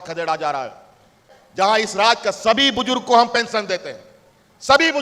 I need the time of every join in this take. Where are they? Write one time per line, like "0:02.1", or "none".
0:01.2